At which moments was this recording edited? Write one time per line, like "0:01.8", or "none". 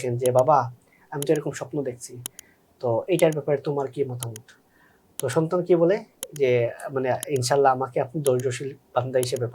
none